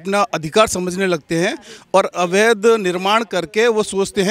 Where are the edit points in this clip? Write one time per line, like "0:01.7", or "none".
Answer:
none